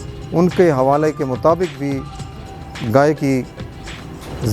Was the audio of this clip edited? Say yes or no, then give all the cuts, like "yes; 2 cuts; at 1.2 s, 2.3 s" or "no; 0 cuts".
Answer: yes; 1 cut; at 2.4 s